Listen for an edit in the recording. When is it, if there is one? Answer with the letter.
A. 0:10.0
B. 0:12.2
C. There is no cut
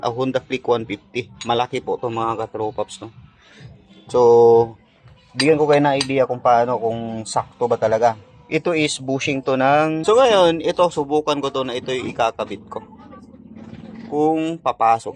A